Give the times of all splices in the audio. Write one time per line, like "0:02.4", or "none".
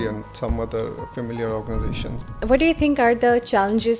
0:02.3